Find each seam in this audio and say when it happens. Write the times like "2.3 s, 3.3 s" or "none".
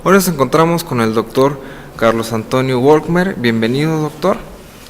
1.9 s